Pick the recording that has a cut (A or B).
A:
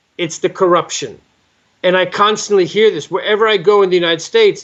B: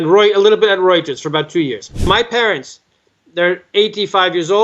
B